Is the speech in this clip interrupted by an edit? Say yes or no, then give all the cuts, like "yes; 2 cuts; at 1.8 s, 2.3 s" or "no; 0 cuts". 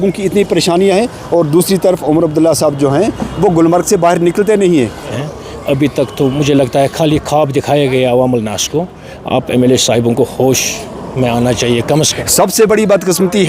yes; 2 cuts; at 5.0 s, 12.2 s